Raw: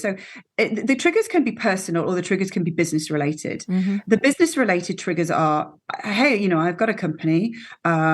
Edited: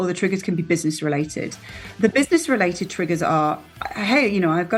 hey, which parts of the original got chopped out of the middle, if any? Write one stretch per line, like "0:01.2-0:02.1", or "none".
none